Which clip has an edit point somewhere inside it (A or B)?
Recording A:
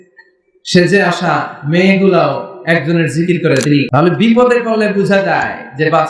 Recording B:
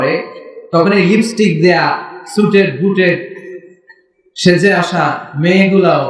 A